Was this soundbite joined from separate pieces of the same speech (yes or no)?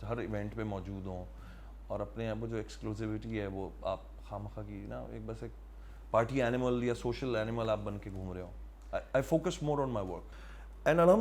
yes